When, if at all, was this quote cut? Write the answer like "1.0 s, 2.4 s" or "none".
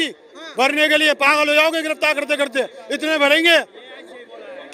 none